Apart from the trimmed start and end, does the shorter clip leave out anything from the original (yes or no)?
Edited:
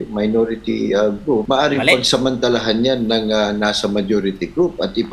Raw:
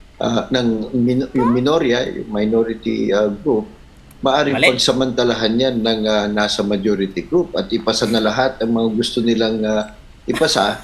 yes